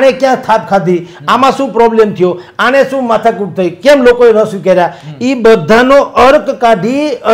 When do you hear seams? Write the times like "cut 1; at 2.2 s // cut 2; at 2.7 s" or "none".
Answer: none